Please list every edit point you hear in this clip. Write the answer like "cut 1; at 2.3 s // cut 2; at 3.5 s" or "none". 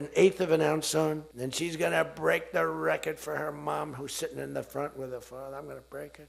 cut 1; at 1.4 s